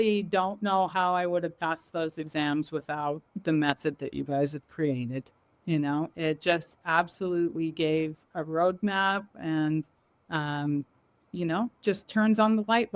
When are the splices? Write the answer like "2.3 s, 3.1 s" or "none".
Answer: none